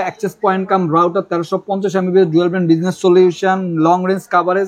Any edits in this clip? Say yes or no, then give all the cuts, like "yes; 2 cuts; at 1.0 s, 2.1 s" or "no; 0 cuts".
no; 0 cuts